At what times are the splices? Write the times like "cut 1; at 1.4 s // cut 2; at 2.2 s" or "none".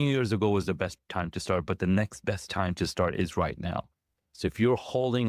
cut 1; at 1.0 s